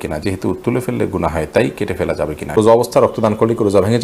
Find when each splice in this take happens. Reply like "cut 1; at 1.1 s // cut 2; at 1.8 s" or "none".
cut 1; at 2.6 s